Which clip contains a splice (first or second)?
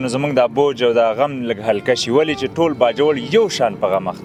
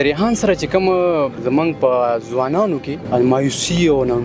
second